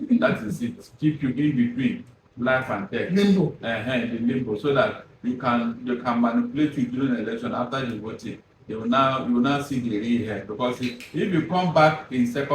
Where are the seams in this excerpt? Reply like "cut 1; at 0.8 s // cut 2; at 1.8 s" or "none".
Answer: none